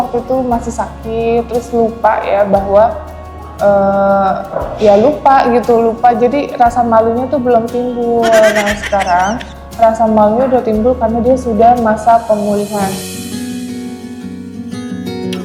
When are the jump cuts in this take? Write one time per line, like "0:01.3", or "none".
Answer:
none